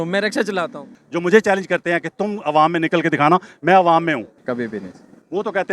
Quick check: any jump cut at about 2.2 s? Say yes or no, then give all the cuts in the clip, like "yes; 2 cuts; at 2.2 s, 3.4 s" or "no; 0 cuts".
no; 2 cuts; at 0.9 s, 4.4 s